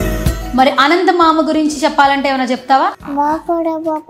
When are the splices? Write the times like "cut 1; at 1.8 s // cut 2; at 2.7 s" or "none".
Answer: none